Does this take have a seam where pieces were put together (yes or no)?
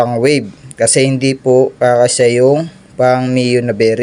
no